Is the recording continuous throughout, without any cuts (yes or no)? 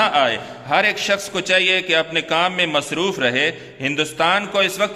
yes